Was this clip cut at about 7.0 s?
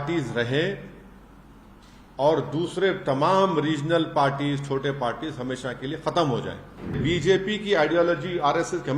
yes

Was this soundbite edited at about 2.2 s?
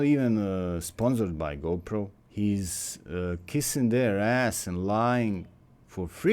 yes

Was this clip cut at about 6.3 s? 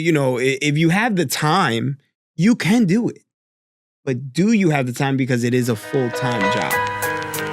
yes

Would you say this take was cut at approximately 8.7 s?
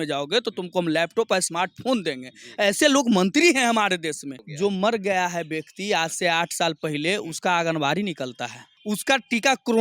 yes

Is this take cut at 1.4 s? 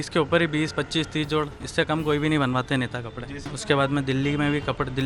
no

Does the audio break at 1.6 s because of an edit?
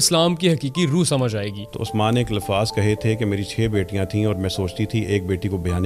yes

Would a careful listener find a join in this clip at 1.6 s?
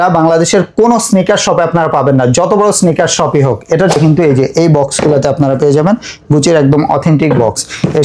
no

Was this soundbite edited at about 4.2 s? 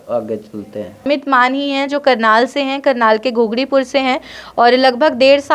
no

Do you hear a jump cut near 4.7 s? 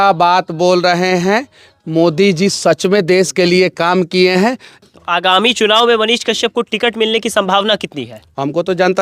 yes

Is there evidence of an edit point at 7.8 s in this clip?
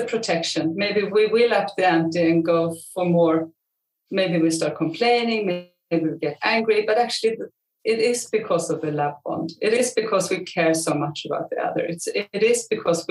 no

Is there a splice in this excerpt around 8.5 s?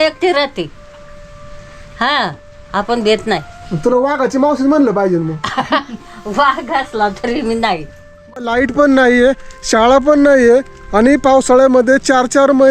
yes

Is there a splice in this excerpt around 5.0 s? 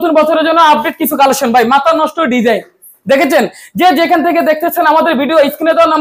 no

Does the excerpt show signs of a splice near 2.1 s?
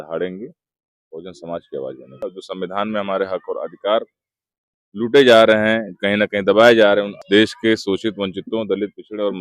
yes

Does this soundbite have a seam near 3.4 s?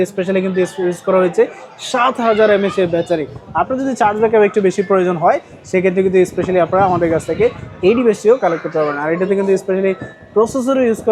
no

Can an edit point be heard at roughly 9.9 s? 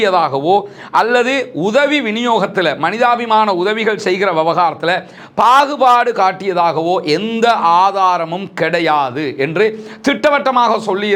no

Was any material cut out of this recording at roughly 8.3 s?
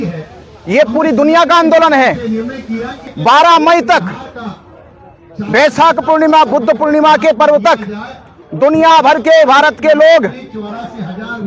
no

